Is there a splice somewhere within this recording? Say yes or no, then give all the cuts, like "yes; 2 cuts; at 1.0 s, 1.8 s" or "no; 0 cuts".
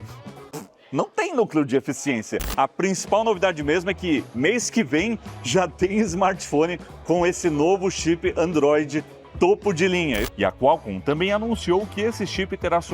yes; 2 cuts; at 2.4 s, 10.3 s